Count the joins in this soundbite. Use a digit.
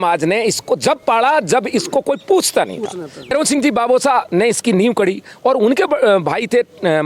1